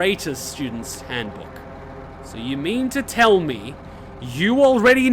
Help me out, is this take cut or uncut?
cut